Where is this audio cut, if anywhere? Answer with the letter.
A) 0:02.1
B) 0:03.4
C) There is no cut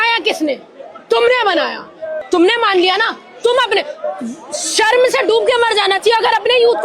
A